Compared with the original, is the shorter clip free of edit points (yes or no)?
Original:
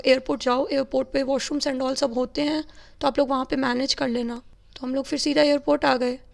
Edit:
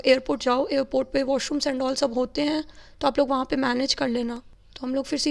yes